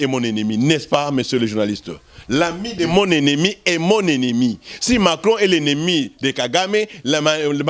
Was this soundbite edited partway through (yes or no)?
no